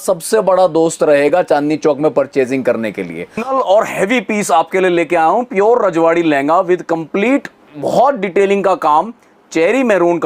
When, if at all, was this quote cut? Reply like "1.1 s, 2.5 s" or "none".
3.4 s